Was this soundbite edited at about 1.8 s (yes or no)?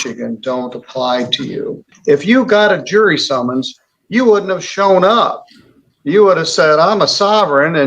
yes